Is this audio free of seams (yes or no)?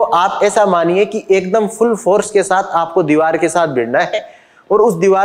yes